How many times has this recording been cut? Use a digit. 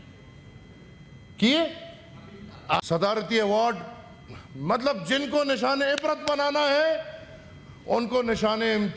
1